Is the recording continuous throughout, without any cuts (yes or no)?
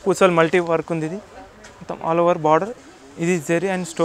no